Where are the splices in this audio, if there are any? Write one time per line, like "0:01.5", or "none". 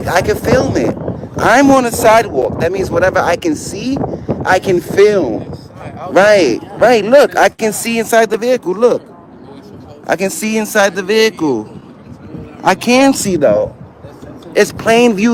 none